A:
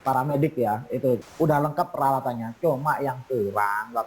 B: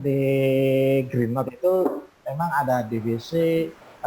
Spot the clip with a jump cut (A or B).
A